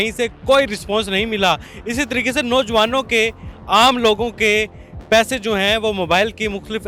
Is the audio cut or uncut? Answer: uncut